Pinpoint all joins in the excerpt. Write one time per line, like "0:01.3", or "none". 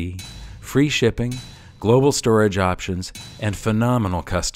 none